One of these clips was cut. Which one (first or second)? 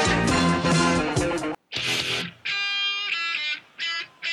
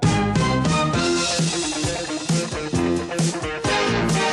first